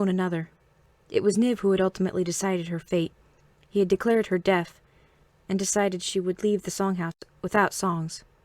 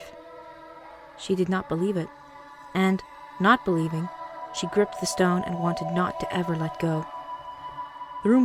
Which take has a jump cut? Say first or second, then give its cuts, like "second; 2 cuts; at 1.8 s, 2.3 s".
first; 1 cut; at 1.3 s